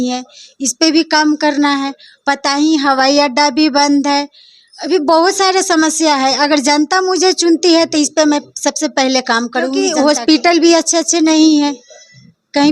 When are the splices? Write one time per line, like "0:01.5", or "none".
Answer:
0:09.8